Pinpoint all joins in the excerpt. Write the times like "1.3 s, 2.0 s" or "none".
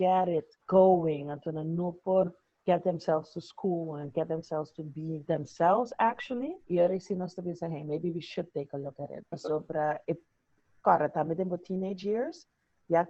none